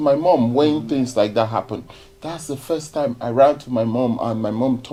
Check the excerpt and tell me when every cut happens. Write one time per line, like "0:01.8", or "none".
none